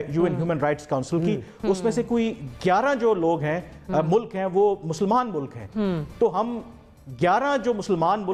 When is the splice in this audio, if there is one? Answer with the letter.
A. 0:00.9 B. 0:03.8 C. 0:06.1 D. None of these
D